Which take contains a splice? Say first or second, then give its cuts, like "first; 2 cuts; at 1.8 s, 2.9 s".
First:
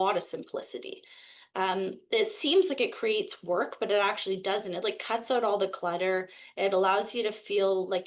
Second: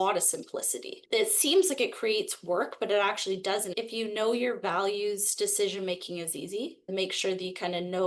second; 3 cuts; at 1.0 s, 3.7 s, 6.9 s